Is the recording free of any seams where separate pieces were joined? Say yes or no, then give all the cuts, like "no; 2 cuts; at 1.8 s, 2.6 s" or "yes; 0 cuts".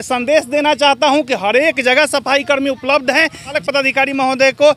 no; 1 cut; at 3.6 s